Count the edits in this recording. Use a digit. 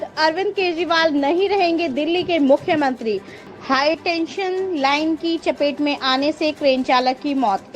1